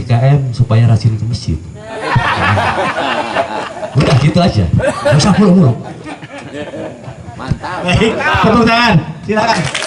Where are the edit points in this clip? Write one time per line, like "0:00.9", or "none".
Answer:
none